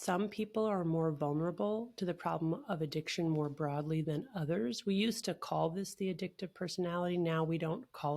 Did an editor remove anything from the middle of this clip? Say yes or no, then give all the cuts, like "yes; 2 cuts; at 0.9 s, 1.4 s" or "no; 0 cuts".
no; 0 cuts